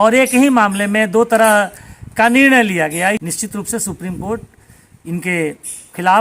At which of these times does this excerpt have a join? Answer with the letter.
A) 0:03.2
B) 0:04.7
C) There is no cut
A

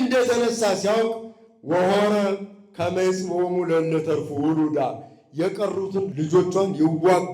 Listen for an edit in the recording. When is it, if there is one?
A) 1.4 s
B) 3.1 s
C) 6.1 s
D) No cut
C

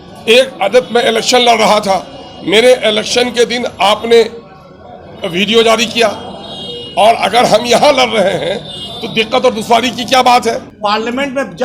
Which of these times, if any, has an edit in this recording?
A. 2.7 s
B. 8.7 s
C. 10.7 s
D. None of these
C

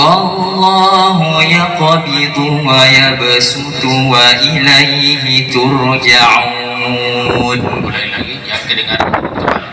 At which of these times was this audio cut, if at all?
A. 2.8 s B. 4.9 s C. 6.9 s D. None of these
D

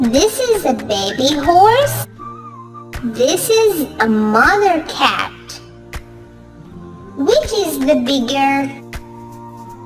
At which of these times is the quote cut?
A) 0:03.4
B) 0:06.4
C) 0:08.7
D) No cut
C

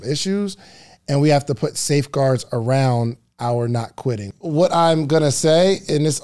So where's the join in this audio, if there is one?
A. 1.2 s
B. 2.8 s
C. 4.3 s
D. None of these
C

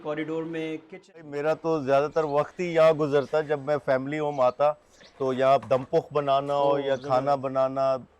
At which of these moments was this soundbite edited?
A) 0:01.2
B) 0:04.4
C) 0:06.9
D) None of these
A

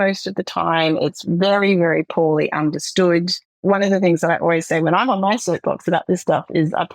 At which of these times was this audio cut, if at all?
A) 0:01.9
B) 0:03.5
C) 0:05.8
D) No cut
B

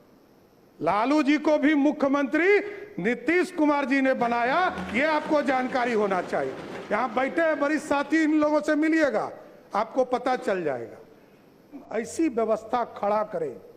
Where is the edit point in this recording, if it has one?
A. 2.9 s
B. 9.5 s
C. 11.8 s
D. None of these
C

